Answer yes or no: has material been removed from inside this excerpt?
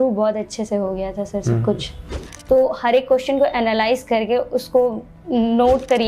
yes